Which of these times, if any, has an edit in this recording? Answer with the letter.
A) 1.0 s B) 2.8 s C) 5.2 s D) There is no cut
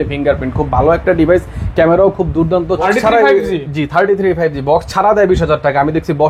B